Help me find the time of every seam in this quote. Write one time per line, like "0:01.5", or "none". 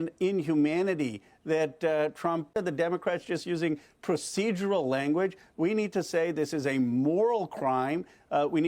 0:02.5